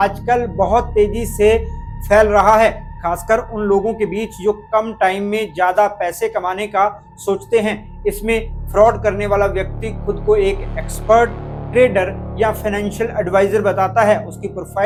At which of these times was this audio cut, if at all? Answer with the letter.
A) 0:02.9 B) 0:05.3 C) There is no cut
C